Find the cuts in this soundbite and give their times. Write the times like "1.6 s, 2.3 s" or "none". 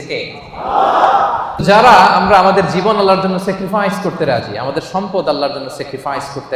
1.6 s

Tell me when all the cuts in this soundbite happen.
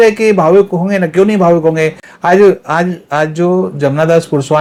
none

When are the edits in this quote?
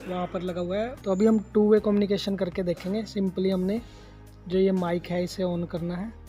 1.0 s

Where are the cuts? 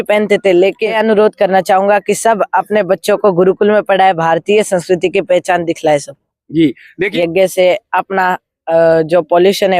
1.0 s, 7.0 s

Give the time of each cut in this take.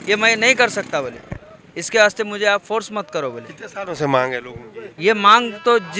none

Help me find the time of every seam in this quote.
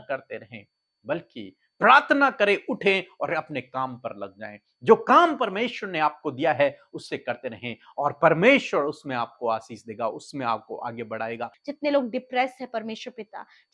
11.6 s

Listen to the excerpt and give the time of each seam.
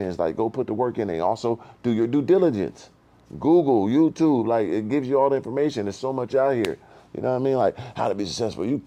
none

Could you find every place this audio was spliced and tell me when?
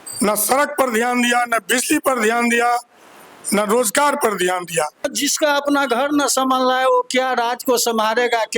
5.1 s

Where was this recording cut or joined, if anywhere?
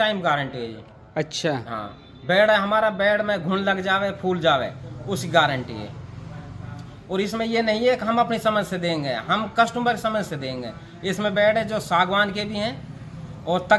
none

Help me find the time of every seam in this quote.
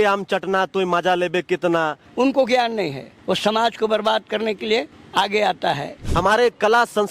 2.1 s, 6.1 s

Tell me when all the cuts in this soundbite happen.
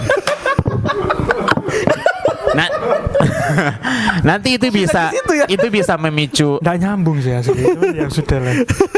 none

